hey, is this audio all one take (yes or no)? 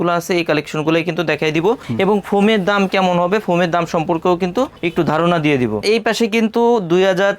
no